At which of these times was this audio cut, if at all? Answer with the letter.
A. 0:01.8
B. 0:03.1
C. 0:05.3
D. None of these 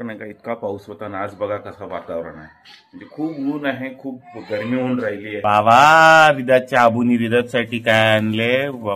C